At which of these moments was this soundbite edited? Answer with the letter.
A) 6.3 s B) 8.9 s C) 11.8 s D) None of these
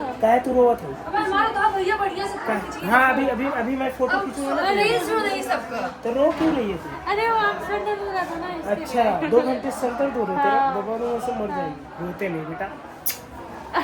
D